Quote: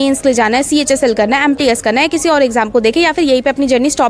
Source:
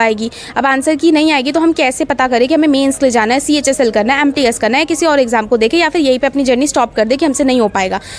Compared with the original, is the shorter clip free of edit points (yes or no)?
yes